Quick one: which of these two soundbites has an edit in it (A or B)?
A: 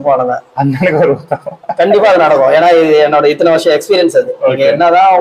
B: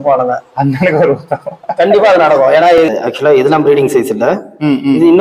B